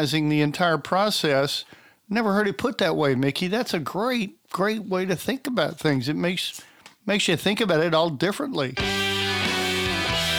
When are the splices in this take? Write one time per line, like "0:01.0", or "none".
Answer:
0:08.7